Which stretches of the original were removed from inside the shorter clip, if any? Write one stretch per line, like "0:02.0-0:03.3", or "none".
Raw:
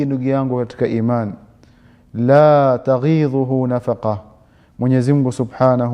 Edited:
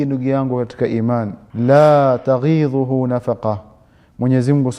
0:01.4-0:02.0